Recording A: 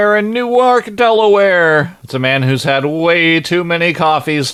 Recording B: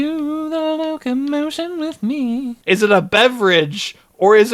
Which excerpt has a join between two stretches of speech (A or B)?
B